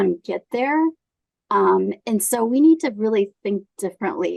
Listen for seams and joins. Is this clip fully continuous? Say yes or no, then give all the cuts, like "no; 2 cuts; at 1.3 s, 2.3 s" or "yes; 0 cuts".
yes; 0 cuts